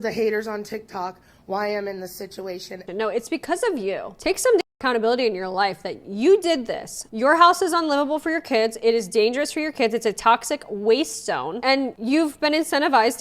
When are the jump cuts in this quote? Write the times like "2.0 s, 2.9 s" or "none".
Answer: 2.8 s, 7.0 s